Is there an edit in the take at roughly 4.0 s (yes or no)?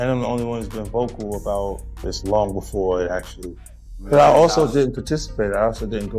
yes